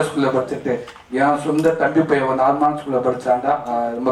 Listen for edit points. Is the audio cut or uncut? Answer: uncut